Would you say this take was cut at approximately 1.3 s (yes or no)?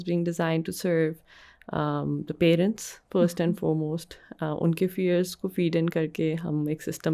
no